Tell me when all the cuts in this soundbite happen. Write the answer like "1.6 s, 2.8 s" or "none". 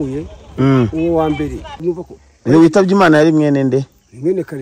1.7 s

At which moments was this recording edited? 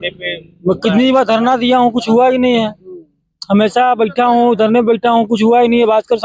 none

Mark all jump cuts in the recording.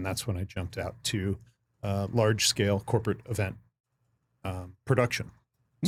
none

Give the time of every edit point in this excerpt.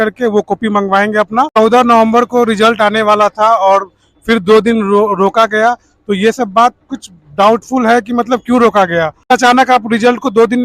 1.6 s, 9.3 s

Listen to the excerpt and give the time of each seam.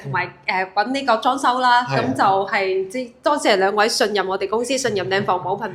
none

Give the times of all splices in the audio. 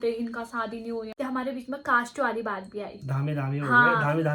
1.1 s

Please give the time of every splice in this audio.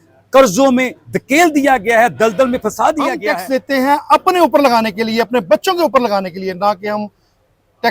3.2 s

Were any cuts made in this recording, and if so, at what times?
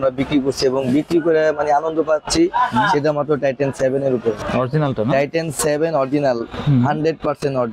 4.4 s

